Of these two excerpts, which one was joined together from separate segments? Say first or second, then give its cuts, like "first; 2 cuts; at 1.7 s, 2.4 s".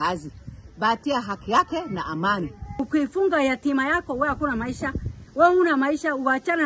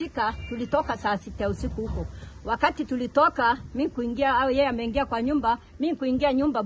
first; 1 cut; at 2.8 s